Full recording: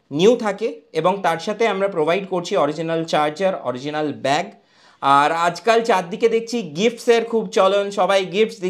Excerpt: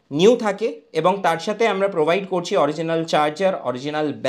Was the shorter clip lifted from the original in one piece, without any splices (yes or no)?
yes